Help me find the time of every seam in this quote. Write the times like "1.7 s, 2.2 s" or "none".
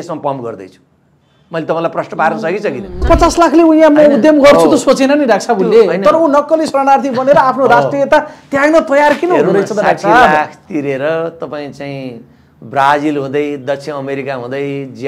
3.1 s